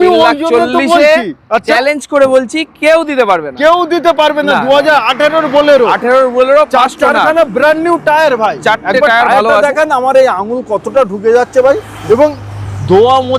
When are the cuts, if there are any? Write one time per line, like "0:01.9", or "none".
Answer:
none